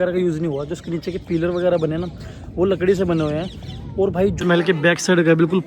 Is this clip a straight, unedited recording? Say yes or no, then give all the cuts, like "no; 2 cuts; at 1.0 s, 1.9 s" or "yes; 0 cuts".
no; 1 cut; at 4.4 s